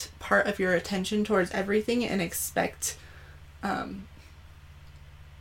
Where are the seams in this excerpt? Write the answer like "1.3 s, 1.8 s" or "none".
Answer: none